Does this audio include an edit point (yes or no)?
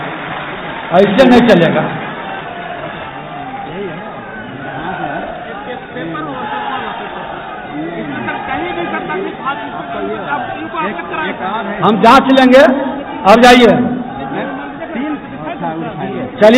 no